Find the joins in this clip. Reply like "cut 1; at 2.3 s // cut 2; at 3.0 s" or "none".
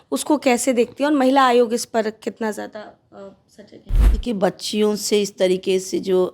cut 1; at 3.9 s